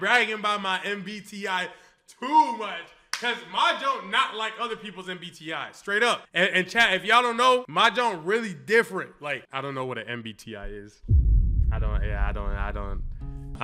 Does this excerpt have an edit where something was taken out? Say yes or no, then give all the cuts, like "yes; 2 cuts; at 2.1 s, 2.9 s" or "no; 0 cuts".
no; 0 cuts